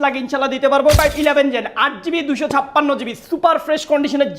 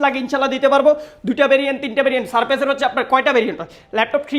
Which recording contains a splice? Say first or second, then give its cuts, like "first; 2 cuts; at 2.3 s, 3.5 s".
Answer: first; 1 cut; at 1.0 s